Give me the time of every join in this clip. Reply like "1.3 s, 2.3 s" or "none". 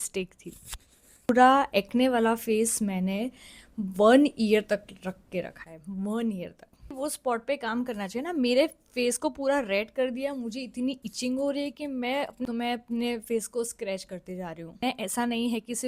1.3 s, 6.9 s, 12.5 s, 14.8 s

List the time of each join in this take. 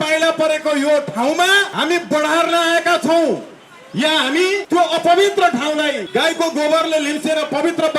1.7 s, 4.6 s, 6.0 s

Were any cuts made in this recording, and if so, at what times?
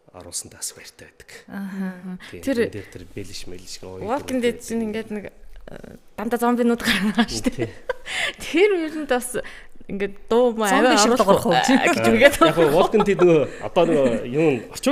none

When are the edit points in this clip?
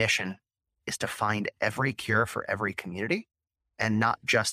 none

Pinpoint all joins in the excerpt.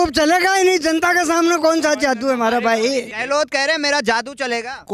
3.1 s

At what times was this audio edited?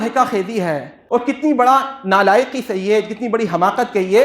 0.9 s

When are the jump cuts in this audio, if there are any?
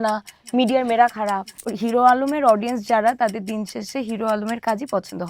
1.6 s

